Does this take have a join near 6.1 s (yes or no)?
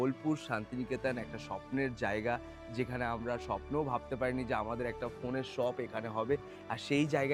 no